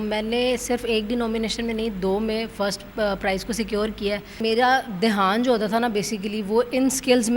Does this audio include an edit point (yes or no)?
yes